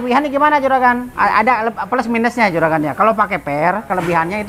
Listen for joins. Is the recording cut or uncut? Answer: cut